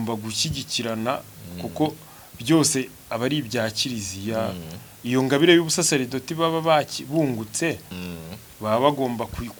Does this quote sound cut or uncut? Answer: uncut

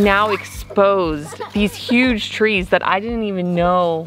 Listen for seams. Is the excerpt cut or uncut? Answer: uncut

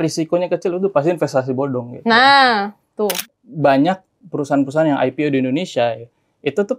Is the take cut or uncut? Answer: cut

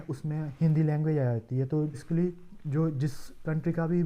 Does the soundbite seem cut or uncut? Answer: cut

